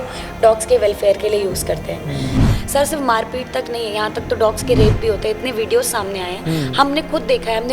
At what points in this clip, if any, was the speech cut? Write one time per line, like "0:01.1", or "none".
0:02.5